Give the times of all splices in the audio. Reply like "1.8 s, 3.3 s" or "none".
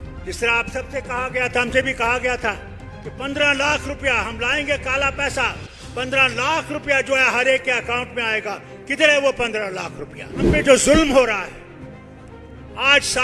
10.6 s